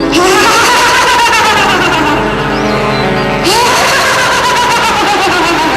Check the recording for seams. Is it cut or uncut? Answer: uncut